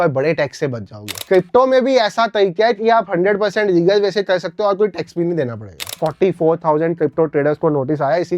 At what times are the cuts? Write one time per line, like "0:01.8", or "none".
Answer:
0:01.2
0:06.0